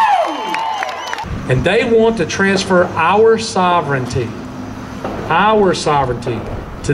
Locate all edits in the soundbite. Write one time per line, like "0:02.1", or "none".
0:01.0